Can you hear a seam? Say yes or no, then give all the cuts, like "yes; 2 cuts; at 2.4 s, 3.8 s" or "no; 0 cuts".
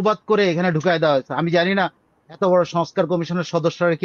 no; 0 cuts